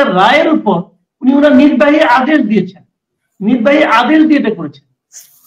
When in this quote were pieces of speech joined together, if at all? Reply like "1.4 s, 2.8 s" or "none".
none

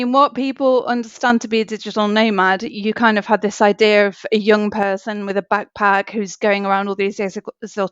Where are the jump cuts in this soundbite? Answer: none

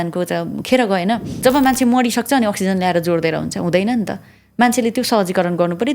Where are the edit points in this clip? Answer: 1.3 s

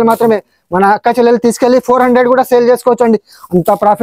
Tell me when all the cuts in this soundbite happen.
none

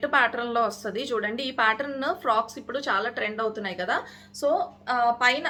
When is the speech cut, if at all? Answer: none

